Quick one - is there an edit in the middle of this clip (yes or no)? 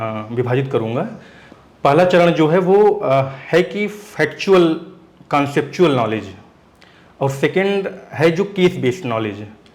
no